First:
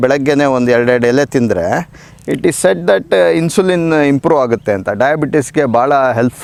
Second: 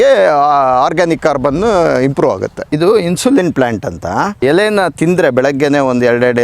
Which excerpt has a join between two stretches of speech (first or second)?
second